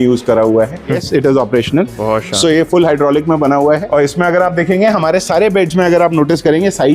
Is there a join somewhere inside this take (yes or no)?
yes